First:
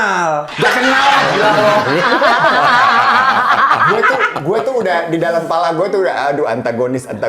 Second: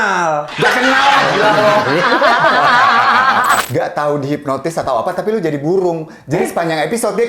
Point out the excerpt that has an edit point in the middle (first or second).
second